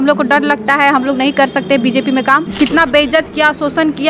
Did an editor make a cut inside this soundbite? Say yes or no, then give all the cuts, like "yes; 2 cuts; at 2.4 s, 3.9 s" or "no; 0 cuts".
yes; 1 cut; at 2.4 s